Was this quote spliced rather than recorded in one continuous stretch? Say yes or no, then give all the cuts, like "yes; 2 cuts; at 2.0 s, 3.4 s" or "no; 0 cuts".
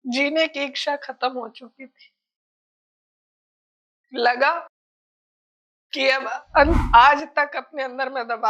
yes; 1 cut; at 6.8 s